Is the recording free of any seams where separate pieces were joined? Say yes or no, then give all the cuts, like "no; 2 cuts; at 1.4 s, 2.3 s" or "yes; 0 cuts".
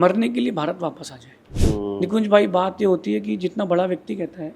no; 1 cut; at 1.5 s